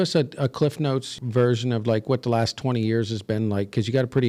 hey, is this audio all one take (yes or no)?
no